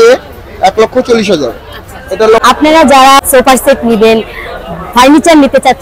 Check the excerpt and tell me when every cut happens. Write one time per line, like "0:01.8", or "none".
0:02.4
0:03.2